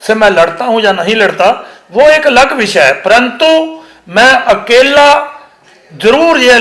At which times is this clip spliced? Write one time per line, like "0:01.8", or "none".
none